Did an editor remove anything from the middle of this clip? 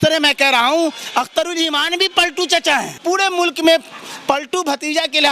yes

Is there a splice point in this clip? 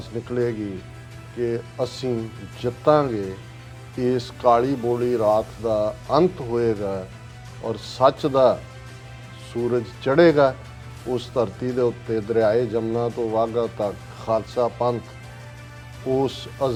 no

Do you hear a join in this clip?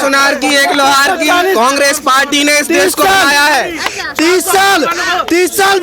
no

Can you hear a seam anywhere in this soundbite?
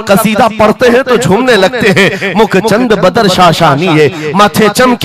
no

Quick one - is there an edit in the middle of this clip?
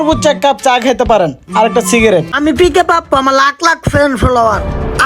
yes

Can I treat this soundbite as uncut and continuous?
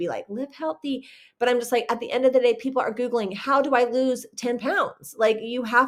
yes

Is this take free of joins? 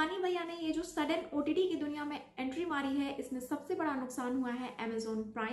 yes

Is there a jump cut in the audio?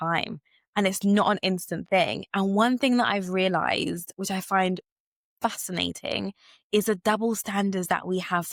no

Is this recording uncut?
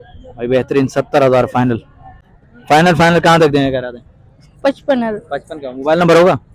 no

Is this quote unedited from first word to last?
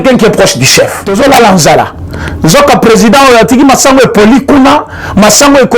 no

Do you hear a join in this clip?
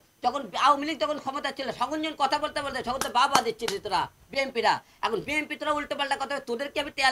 no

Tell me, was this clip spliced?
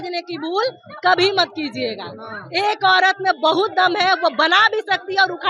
no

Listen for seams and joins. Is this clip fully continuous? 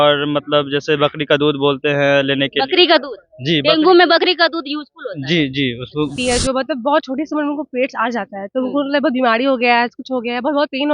no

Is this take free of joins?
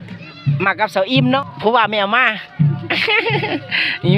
no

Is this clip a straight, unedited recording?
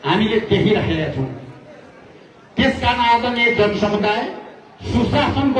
yes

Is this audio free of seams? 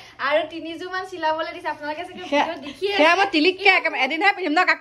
yes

